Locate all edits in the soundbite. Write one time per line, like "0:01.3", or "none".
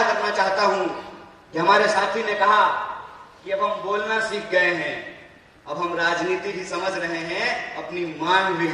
none